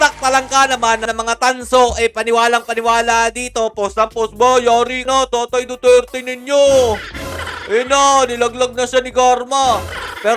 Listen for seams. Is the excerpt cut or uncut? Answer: uncut